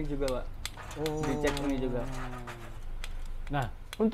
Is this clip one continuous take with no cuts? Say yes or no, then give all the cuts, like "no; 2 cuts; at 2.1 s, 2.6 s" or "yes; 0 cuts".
yes; 0 cuts